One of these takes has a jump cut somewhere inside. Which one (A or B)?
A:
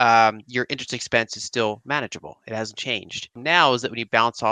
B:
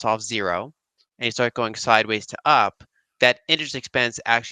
A